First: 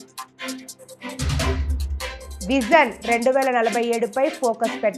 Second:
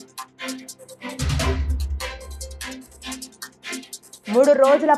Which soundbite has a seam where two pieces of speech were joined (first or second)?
first